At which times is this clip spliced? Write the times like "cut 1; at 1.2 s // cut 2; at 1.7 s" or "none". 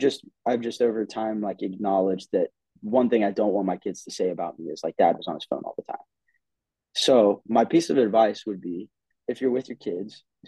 none